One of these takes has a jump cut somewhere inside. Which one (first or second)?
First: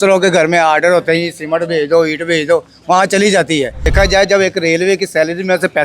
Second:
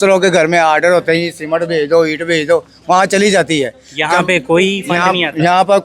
first